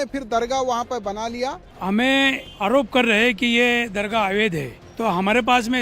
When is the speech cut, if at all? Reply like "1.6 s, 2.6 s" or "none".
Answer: 1.7 s, 2.5 s, 4.8 s